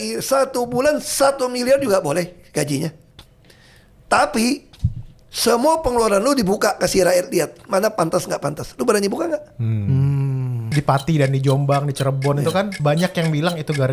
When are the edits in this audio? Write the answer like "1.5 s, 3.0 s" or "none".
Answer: 10.6 s, 12.7 s